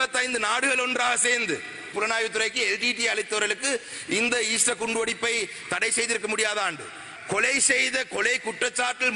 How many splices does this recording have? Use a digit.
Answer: 2